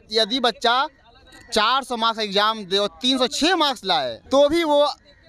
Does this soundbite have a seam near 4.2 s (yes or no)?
yes